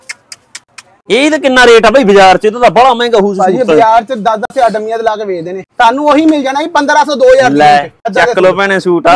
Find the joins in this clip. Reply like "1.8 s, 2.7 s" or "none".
1.1 s, 5.6 s, 8.0 s